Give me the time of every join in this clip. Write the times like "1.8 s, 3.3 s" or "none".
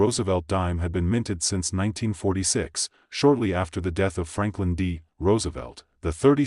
0.8 s, 2.0 s